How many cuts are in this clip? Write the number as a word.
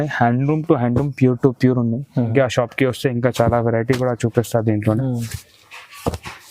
one